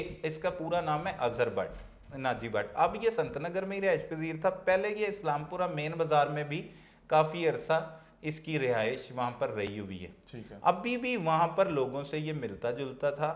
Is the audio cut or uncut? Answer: uncut